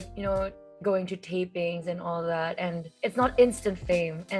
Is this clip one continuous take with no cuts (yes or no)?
yes